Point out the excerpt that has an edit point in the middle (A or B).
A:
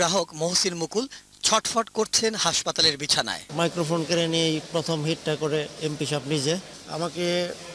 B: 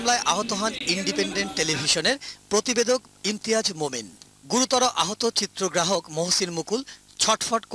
B